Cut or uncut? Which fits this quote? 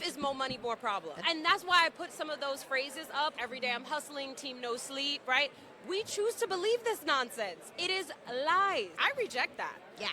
cut